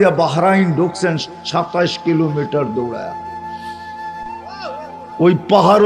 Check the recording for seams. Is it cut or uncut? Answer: cut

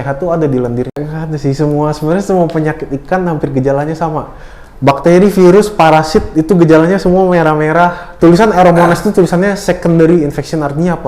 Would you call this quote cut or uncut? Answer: cut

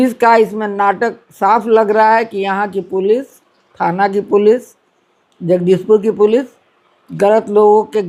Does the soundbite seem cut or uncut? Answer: uncut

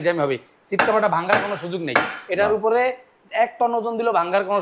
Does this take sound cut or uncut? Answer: uncut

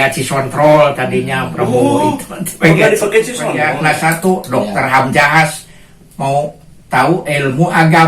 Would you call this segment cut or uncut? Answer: cut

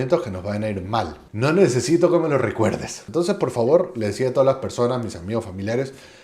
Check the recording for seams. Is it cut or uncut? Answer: cut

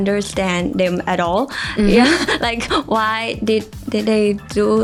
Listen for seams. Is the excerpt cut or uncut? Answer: uncut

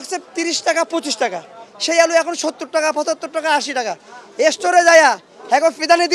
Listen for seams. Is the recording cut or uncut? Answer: uncut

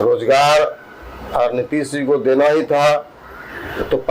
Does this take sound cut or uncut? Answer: uncut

